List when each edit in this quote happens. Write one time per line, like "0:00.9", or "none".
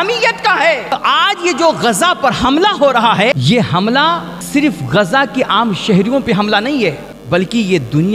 0:00.9
0:03.3
0:04.3
0:07.1